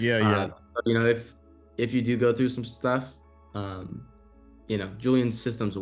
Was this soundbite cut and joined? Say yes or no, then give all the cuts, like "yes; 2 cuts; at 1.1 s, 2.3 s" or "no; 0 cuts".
no; 0 cuts